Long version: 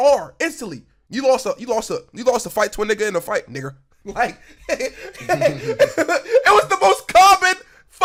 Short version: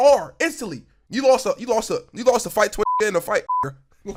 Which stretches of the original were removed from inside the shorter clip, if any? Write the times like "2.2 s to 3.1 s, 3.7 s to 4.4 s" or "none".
none